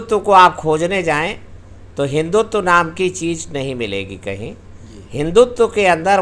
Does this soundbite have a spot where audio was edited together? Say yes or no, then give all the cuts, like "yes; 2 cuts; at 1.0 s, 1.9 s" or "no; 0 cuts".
no; 0 cuts